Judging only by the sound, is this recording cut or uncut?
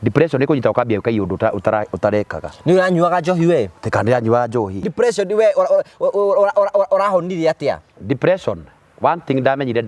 cut